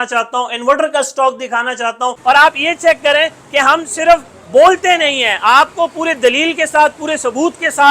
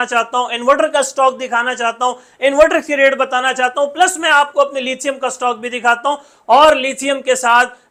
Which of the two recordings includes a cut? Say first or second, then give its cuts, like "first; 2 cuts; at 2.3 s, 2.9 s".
first; 1 cut; at 2.2 s